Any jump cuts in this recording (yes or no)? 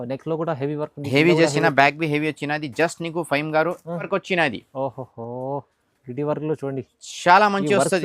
yes